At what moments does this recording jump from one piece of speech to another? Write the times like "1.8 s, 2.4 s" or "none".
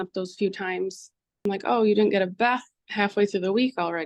2.8 s